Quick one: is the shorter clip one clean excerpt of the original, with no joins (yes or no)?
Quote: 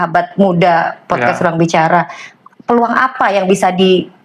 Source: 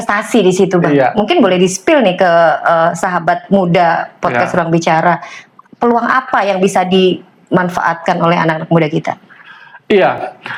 yes